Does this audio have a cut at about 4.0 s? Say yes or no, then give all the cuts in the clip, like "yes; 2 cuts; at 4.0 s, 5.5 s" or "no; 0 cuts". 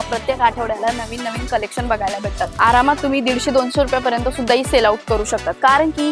no; 1 cut; at 2.5 s